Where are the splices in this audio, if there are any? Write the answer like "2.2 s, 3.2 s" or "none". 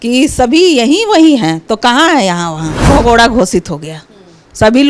2.9 s